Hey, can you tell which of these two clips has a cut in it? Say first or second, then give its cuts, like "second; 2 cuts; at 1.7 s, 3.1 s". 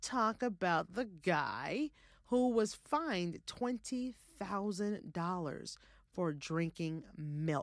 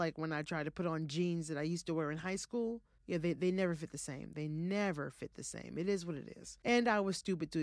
second; 2 cuts; at 2.9 s, 6.5 s